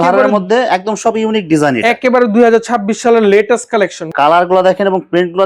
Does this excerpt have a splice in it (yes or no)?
yes